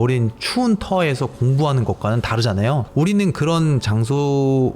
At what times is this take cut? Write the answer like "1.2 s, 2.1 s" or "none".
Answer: 2.9 s